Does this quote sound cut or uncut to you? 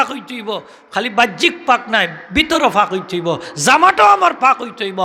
uncut